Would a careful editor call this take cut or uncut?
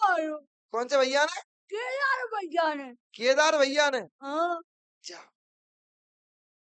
uncut